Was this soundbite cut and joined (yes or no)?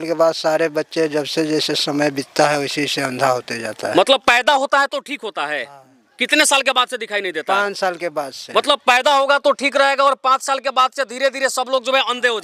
no